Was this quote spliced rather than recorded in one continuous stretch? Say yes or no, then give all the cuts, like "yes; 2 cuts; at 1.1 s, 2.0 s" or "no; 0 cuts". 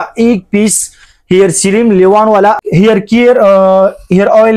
yes; 1 cut; at 2.6 s